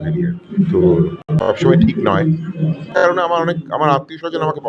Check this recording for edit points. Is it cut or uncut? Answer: cut